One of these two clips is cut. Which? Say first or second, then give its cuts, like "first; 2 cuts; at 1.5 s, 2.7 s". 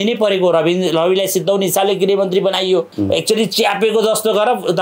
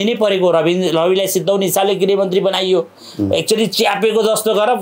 first; 1 cut; at 2.9 s